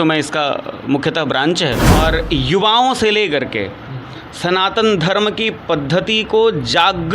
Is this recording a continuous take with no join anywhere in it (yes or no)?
no